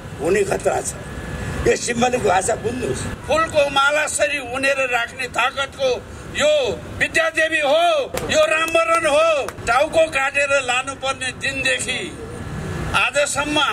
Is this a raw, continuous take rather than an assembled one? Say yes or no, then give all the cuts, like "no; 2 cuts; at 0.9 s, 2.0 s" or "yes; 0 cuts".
no; 3 cuts; at 3.1 s, 8.2 s, 9.5 s